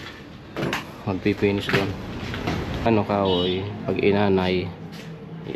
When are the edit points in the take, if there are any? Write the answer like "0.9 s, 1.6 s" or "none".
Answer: 2.9 s